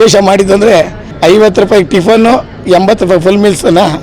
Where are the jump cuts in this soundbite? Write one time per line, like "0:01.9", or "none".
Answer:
0:01.0